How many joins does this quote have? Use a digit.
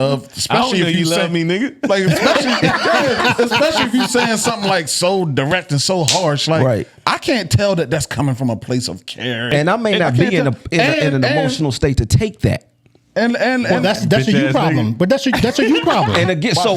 1